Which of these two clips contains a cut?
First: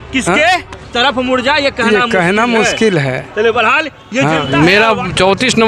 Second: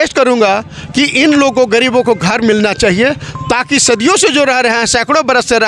first; 1 cut; at 4.5 s

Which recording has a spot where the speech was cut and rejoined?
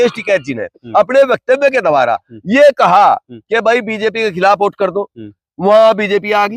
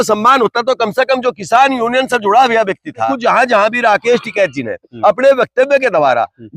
second; 1 cut; at 3.1 s

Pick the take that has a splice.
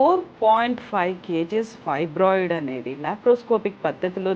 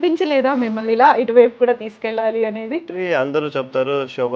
second; 1 cut; at 2.9 s

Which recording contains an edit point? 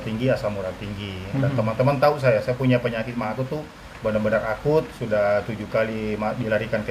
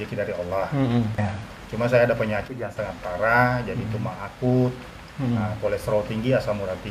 second; 1 cut; at 1.2 s

